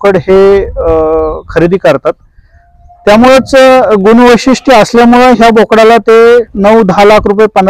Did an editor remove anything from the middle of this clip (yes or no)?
no